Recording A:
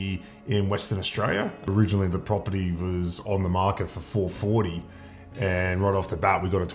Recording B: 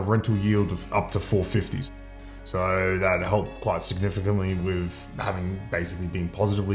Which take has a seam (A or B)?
A